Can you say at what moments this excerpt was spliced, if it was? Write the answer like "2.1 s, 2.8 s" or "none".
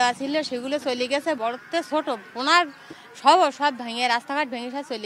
1.4 s